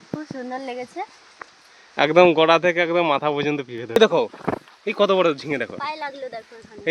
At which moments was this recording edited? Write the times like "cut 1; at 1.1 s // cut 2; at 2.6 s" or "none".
cut 1; at 4.0 s